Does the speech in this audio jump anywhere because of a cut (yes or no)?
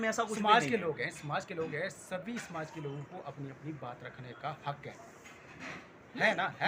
no